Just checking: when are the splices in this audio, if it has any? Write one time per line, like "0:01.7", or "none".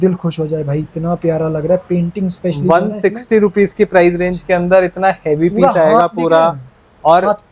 none